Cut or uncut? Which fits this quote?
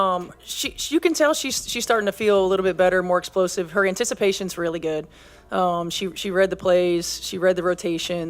uncut